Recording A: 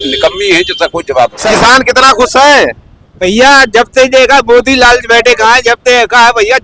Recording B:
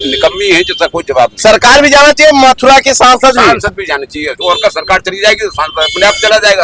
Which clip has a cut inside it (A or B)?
A